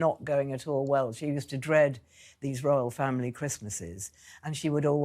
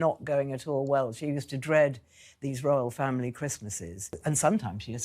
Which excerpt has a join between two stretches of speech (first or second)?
second